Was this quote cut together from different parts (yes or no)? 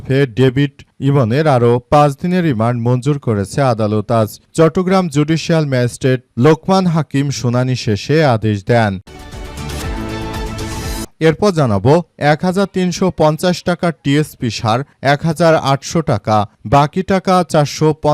yes